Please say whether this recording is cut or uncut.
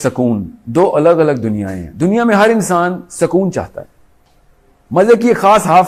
uncut